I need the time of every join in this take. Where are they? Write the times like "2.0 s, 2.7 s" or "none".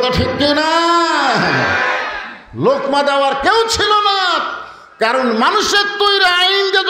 none